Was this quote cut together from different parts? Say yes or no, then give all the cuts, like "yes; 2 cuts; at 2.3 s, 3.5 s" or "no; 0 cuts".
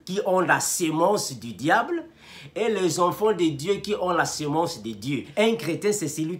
yes; 1 cut; at 5.3 s